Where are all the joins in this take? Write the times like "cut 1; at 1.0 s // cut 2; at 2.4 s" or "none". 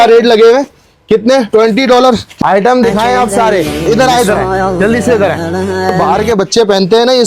cut 1; at 2.3 s // cut 2; at 3.8 s // cut 3; at 5.9 s